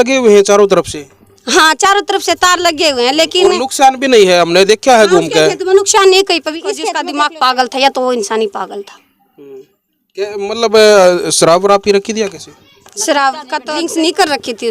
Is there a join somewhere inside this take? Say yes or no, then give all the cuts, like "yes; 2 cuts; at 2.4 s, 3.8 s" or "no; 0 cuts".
yes; 2 cuts; at 7.0 s, 13.5 s